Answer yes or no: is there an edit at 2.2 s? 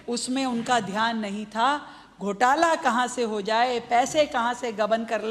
no